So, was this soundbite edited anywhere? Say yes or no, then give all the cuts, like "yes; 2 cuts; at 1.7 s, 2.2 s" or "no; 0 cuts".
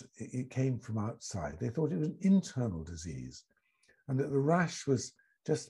no; 0 cuts